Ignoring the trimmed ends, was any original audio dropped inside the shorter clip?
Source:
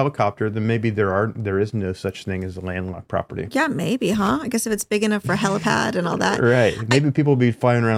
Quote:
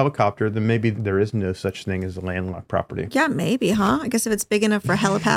yes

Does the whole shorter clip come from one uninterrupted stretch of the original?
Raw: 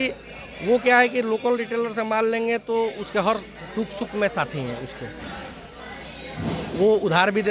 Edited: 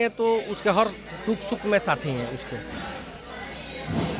yes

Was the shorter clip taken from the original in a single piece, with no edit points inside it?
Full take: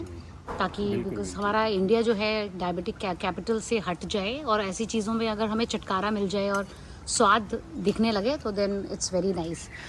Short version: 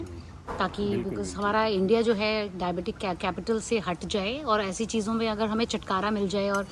yes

